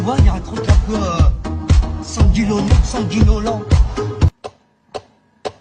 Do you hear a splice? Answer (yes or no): no